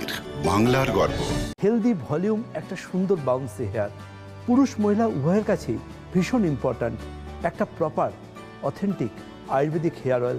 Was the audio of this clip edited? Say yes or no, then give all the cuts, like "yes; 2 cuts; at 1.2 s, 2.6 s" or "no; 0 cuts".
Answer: yes; 1 cut; at 1.4 s